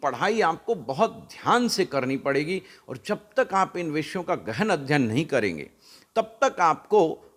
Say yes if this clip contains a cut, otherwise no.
no